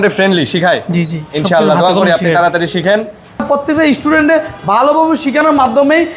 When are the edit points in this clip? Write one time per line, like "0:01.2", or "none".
0:03.4